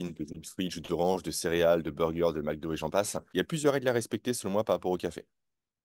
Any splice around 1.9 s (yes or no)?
no